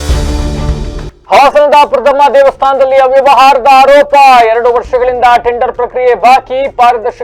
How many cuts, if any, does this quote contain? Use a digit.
1